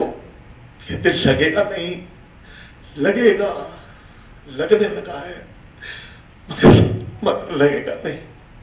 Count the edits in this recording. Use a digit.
0